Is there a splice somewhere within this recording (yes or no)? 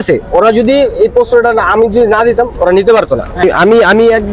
yes